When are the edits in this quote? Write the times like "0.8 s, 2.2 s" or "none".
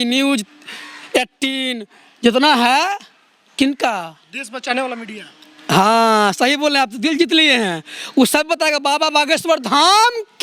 none